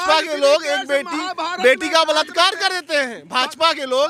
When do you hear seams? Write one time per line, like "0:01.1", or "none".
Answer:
none